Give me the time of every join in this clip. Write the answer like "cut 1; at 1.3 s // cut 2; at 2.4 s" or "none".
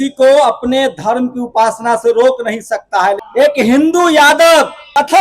cut 1; at 3.2 s